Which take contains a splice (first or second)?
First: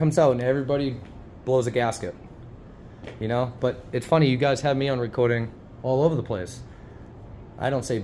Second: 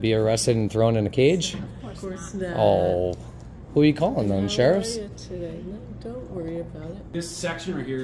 second